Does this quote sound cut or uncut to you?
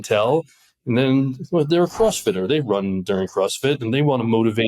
uncut